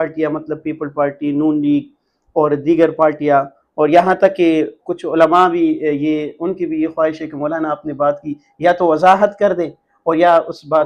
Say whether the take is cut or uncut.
uncut